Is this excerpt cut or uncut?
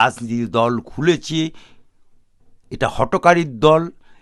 uncut